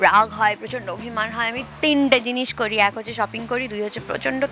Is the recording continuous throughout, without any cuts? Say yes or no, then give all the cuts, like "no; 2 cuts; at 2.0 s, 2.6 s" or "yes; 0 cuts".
yes; 0 cuts